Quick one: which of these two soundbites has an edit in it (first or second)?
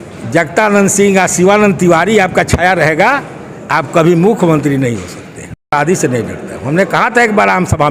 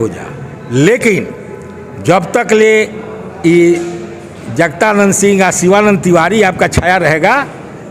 first